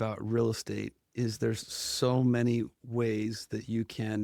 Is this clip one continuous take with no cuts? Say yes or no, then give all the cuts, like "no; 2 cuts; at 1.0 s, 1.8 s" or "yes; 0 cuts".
yes; 0 cuts